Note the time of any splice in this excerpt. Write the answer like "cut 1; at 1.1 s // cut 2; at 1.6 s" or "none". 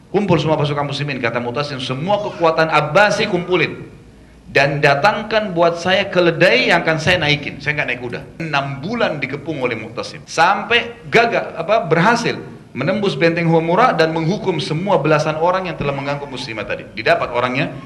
cut 1; at 8.3 s // cut 2; at 10.2 s